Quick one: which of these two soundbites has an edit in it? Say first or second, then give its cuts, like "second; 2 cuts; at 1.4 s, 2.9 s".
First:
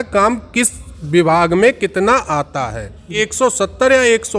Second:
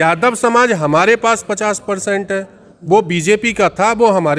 first; 1 cut; at 3.2 s